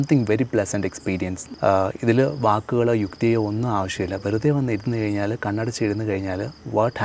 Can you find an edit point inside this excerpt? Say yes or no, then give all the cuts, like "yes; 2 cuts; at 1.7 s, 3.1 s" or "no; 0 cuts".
yes; 1 cut; at 1.4 s